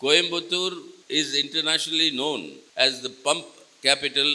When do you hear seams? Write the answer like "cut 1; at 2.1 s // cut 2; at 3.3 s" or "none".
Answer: cut 1; at 0.9 s // cut 2; at 2.6 s